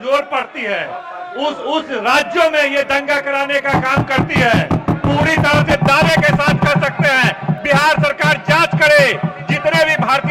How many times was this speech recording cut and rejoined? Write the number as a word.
zero